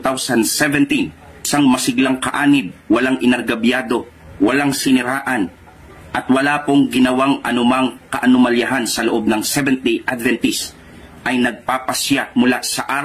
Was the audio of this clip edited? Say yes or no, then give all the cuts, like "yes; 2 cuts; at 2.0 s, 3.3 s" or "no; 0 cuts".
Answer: no; 0 cuts